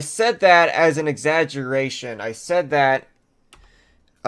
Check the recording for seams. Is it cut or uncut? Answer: uncut